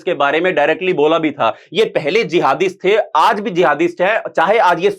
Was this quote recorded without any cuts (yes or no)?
yes